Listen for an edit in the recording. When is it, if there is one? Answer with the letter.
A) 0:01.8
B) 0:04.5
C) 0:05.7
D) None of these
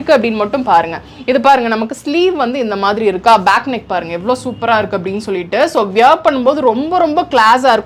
D